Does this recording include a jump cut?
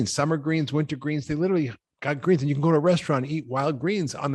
no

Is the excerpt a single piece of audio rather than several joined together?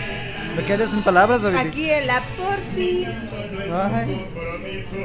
yes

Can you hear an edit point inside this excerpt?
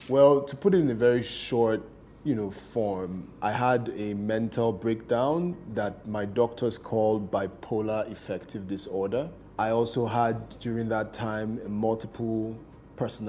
yes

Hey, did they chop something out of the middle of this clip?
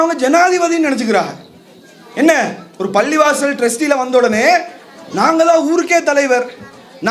no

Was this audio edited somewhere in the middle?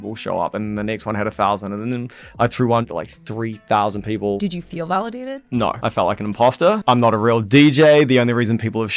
yes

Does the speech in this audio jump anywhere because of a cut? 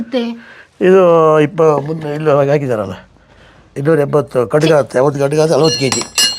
yes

